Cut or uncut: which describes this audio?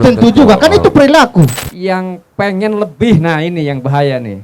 cut